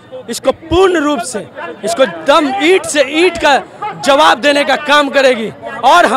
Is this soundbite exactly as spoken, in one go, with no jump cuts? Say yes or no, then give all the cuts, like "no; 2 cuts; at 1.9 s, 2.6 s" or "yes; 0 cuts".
yes; 0 cuts